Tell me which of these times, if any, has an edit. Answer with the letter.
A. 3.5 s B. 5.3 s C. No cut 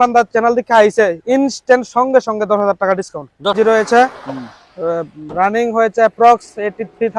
A